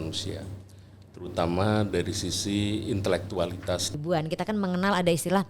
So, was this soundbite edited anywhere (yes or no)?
yes